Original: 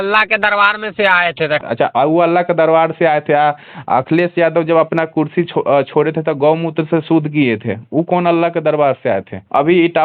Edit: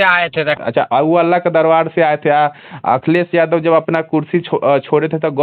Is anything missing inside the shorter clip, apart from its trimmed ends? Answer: no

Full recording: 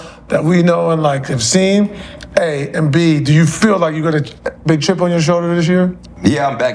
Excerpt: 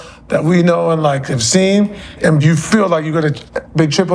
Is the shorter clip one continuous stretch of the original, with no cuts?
no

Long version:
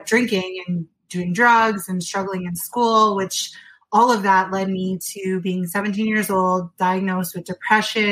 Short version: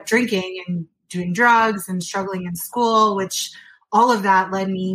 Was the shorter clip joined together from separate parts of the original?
no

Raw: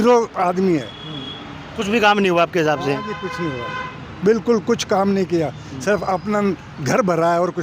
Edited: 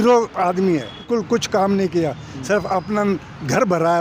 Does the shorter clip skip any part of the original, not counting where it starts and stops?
yes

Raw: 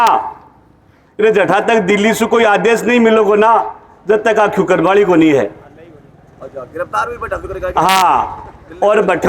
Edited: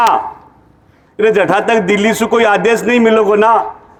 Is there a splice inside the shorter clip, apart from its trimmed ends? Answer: no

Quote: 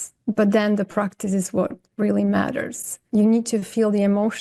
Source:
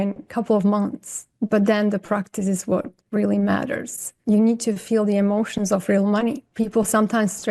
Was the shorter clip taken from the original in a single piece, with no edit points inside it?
yes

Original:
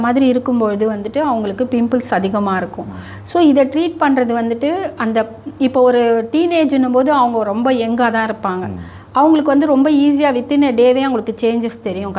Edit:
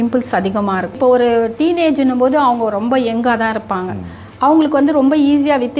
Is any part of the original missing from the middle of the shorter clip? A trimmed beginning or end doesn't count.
yes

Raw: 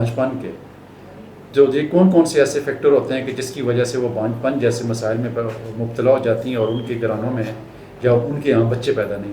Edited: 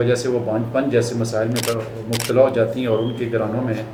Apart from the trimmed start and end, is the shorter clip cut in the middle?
no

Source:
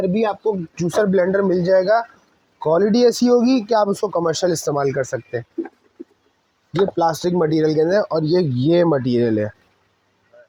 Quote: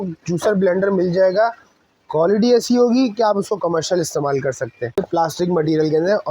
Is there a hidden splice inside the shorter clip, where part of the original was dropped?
yes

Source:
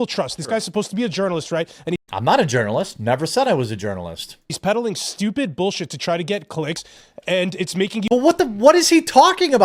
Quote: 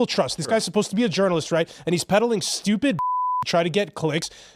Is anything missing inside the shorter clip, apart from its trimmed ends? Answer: yes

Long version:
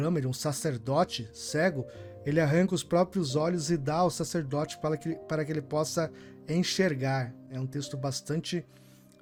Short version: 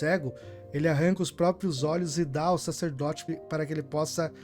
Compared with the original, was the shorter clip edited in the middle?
yes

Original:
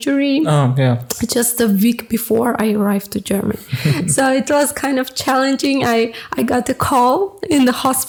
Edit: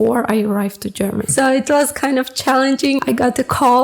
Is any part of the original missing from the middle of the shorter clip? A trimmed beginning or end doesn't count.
yes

